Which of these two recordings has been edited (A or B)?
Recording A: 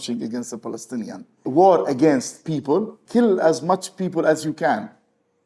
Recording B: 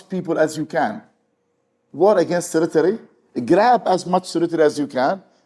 A